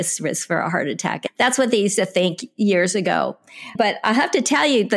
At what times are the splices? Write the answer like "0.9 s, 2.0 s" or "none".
1.2 s, 3.7 s